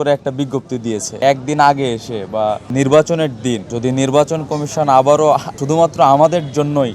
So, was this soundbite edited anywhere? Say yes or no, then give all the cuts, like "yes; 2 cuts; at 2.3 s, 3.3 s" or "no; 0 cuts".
no; 0 cuts